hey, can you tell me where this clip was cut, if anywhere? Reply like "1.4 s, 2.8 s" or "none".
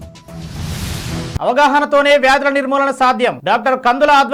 none